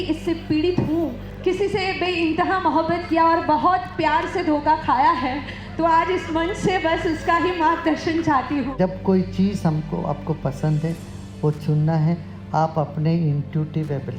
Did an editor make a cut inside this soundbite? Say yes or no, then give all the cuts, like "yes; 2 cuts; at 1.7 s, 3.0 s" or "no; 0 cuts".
yes; 2 cuts; at 1.3 s, 8.7 s